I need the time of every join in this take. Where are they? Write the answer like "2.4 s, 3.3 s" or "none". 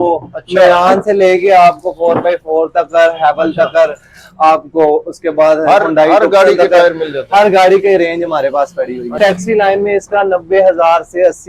9.2 s